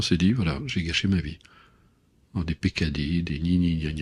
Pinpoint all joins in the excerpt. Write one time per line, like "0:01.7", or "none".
none